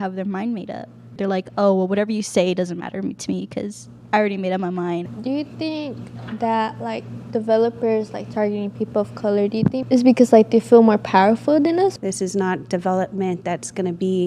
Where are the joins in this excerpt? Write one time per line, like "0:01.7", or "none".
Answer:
0:01.2
0:05.0
0:09.8
0:11.9